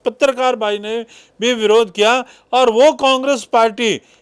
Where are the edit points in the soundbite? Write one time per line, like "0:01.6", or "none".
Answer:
none